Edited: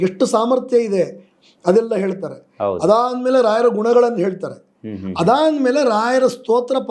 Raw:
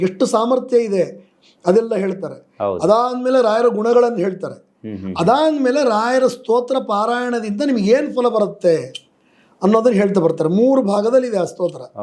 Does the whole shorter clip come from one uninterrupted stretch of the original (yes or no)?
yes